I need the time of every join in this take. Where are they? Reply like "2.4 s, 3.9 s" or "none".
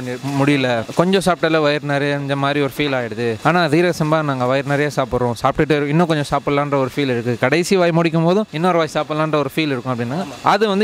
none